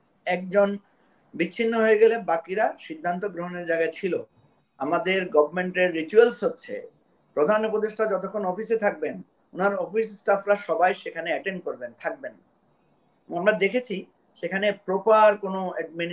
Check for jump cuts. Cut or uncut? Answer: cut